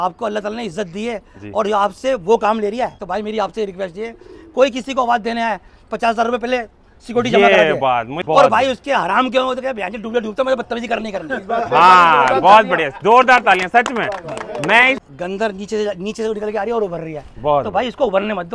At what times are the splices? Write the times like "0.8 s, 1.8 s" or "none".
3.0 s, 8.1 s, 15.0 s

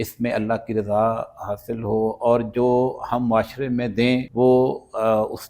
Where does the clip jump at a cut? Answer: 4.3 s

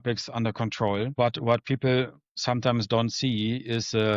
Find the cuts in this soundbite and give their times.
1.1 s

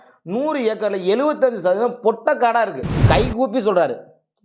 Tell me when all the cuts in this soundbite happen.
3.0 s

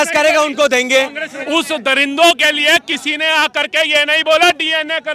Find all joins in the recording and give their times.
1.3 s

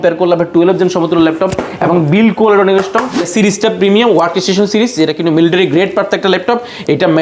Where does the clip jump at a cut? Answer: 3.3 s

